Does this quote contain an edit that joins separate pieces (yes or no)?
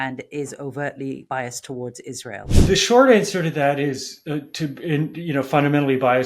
yes